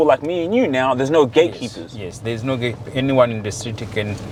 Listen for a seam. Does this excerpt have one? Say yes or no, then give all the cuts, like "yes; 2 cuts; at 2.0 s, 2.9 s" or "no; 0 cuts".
no; 0 cuts